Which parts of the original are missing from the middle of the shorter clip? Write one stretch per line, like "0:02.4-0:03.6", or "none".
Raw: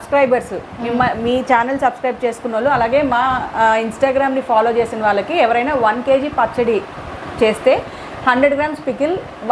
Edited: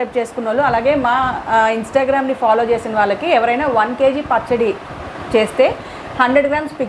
none